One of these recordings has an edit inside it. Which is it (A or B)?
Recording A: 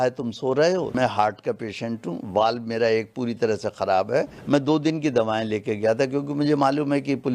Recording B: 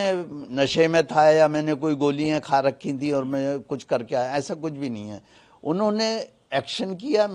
A